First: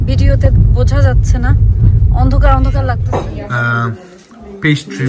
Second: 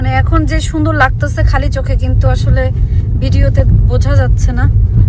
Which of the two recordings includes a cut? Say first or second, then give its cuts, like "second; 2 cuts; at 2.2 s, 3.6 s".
first; 1 cut; at 3.0 s